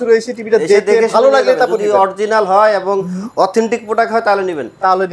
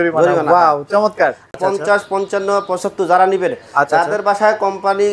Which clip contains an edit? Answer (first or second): second